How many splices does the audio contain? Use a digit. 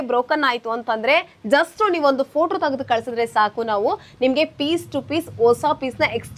0